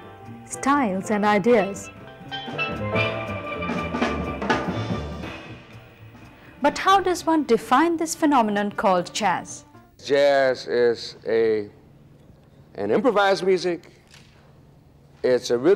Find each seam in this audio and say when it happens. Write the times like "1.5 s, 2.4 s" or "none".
10.0 s

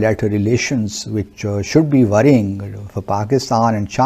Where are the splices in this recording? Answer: none

